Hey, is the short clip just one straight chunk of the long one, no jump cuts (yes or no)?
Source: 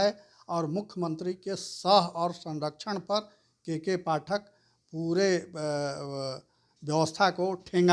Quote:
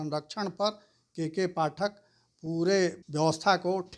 no